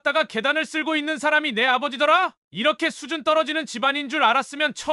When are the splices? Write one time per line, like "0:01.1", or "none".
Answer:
0:02.4